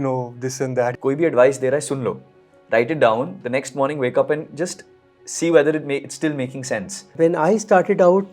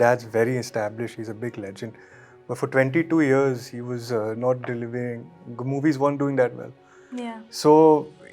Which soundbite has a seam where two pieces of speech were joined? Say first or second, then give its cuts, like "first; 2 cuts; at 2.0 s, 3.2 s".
first; 2 cuts; at 1.0 s, 7.0 s